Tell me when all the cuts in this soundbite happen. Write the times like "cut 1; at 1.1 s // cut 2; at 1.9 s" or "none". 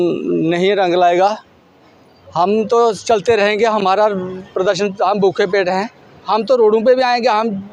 none